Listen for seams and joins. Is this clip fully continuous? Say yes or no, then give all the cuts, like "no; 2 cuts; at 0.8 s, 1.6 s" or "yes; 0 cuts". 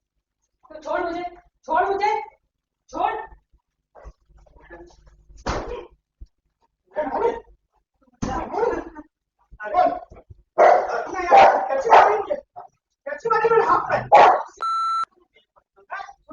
yes; 0 cuts